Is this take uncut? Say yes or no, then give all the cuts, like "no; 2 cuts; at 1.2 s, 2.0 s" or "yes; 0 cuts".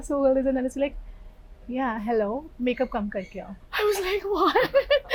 yes; 0 cuts